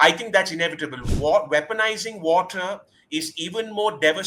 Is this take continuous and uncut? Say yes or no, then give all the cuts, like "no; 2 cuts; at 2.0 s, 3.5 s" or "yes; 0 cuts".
no; 1 cut; at 1.0 s